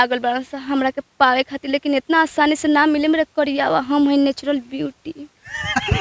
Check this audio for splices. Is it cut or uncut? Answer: uncut